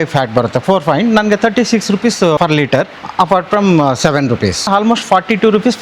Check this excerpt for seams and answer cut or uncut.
cut